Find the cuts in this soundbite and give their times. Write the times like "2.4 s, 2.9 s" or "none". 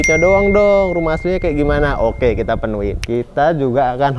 3.0 s